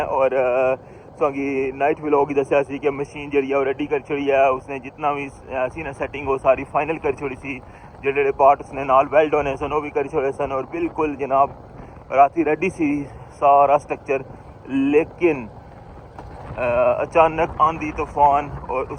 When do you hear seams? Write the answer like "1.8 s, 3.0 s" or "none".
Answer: none